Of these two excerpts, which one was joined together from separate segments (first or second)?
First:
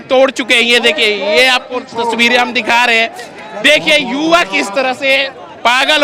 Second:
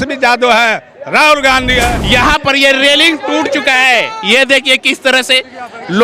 second